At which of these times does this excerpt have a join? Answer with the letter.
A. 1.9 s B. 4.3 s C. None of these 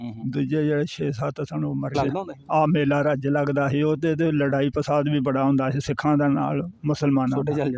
A